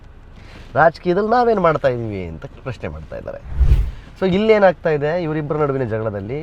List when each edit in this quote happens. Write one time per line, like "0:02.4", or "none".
0:03.6